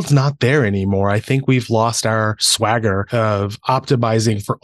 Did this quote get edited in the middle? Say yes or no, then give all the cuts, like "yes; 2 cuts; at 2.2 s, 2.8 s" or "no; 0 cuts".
yes; 1 cut; at 2.7 s